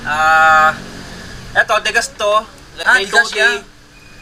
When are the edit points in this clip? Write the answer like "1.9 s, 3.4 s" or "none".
none